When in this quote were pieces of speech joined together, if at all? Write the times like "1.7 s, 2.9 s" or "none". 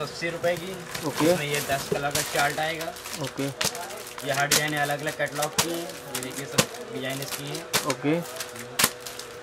none